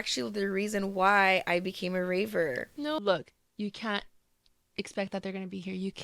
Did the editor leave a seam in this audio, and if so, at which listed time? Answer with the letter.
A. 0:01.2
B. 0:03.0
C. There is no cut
B